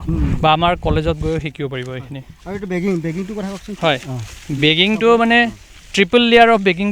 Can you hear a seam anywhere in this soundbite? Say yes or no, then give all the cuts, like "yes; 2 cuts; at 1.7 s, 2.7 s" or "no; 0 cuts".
no; 0 cuts